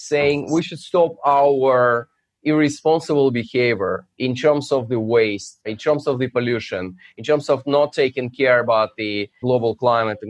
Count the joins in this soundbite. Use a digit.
1